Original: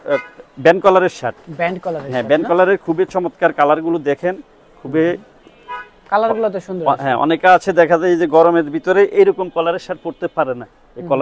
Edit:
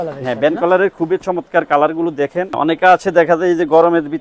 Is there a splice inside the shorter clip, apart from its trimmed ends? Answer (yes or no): yes